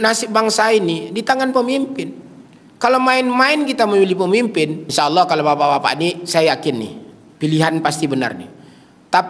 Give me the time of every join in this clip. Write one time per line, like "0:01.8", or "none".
0:04.8

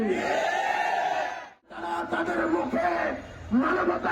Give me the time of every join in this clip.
0:01.8

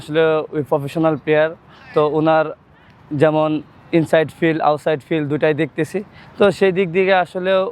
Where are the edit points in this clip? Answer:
none

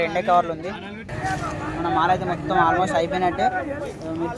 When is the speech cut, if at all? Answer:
0:01.1

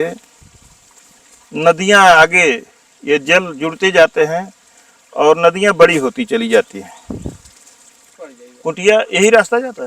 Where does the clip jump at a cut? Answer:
0:08.3

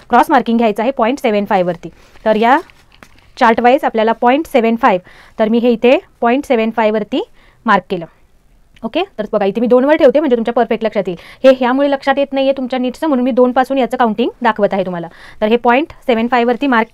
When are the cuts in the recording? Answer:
none

